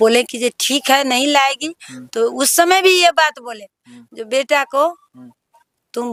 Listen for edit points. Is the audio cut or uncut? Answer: uncut